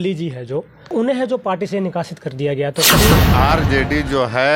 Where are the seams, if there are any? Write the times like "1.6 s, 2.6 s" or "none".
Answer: 0.9 s, 3.1 s

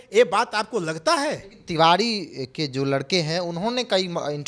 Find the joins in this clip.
none

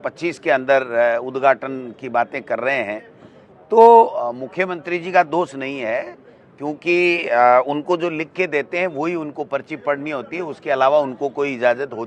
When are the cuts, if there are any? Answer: none

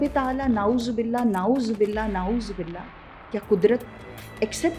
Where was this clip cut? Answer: none

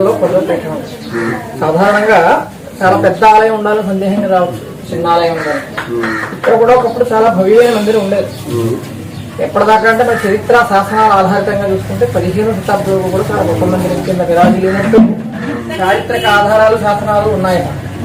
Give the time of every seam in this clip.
none

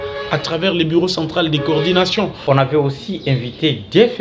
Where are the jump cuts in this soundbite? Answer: 2.4 s

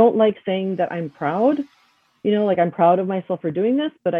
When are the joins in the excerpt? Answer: none

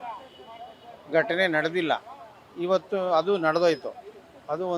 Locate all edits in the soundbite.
none

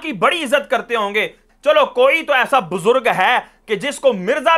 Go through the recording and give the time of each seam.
1.5 s

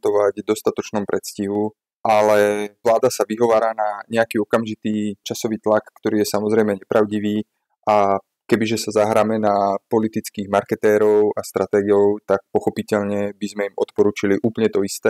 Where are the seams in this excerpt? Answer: 5.3 s

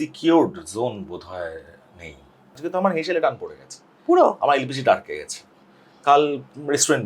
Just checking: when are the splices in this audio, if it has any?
2.6 s

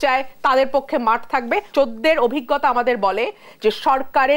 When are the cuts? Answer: 1.7 s

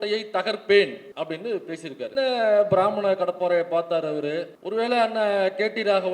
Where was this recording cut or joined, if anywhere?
1.0 s, 2.1 s, 4.6 s

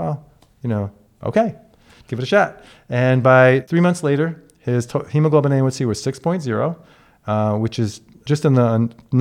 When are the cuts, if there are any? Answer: 3.7 s, 8.2 s

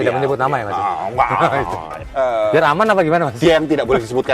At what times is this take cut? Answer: 1.9 s

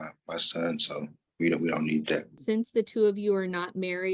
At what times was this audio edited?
1.2 s, 2.3 s

